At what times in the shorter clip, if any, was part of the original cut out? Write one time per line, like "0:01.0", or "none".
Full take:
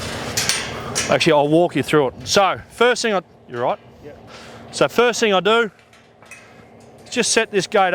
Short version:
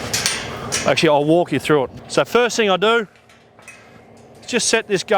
0:02.0